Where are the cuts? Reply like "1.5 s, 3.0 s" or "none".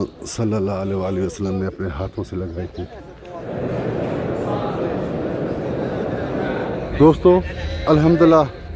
3.4 s, 6.9 s